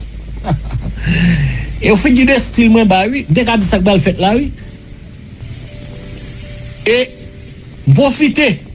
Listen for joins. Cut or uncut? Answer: cut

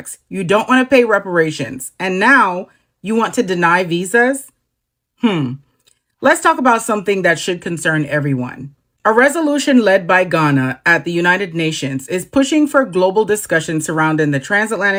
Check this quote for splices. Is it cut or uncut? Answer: uncut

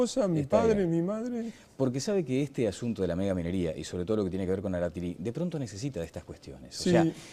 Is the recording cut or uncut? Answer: uncut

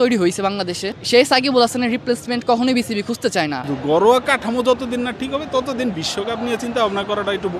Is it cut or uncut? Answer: cut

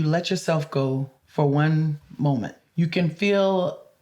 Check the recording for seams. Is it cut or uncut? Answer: cut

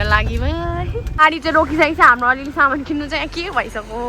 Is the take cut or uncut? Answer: cut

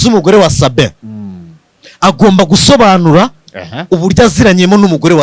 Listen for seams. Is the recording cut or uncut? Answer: uncut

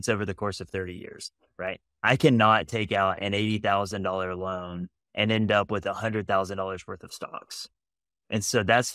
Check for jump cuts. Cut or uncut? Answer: cut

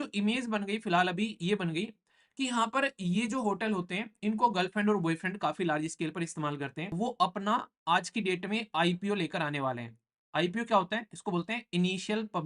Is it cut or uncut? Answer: cut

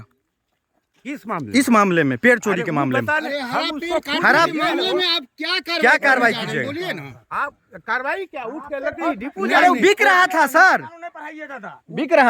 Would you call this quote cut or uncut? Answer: uncut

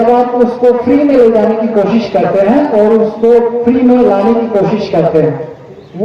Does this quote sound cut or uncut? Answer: uncut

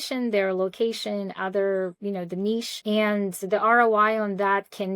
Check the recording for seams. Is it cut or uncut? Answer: cut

